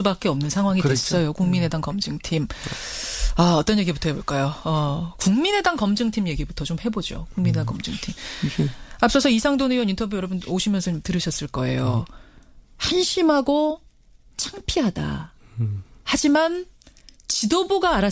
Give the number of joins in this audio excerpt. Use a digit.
0